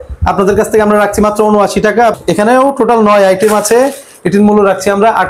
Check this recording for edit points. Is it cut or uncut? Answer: cut